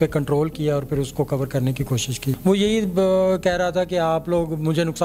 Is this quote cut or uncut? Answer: cut